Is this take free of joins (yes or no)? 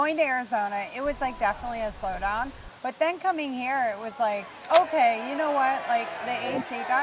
no